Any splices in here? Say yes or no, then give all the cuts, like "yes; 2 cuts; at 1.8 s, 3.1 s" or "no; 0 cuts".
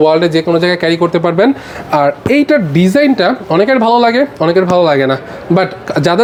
no; 0 cuts